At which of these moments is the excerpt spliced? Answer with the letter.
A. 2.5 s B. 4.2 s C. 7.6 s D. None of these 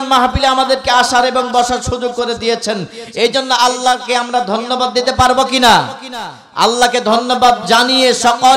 C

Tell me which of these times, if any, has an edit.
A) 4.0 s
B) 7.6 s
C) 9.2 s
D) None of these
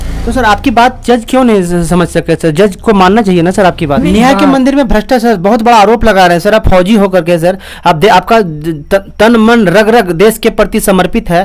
A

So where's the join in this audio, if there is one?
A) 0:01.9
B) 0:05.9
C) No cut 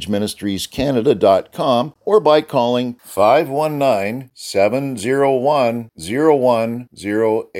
A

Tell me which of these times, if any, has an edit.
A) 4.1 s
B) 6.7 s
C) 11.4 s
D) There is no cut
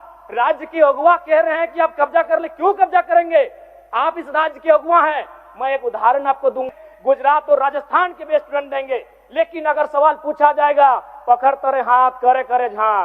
B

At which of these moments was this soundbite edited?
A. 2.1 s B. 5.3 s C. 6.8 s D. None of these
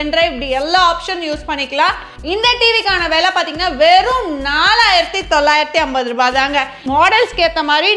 C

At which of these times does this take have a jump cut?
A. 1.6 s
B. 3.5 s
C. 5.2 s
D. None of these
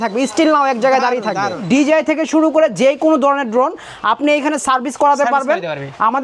A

